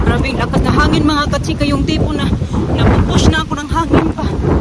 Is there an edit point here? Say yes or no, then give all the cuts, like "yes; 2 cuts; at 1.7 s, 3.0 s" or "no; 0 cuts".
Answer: no; 0 cuts